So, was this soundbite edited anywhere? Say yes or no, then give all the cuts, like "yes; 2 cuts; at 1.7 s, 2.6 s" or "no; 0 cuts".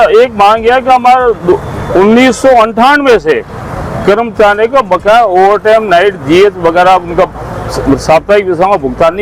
no; 0 cuts